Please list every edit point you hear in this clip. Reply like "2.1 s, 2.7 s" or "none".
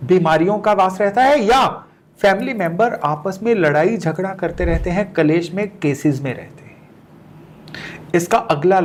none